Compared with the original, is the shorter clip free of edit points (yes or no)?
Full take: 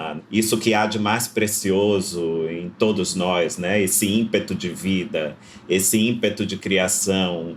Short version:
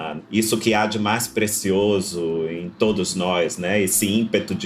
yes